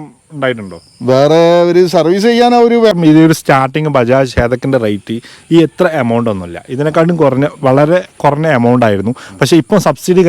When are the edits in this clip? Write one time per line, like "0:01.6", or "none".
0:03.0